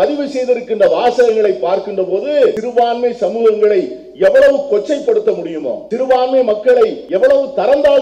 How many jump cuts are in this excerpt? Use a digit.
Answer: 3